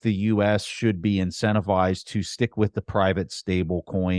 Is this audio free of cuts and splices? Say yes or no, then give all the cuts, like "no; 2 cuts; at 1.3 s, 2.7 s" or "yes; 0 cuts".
yes; 0 cuts